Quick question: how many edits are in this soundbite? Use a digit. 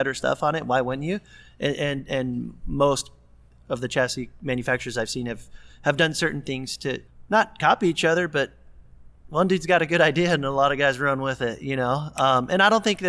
1